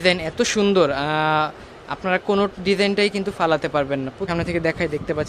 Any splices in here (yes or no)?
yes